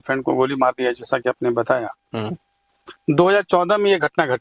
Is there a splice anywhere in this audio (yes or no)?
no